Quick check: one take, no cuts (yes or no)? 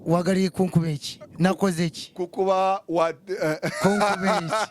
yes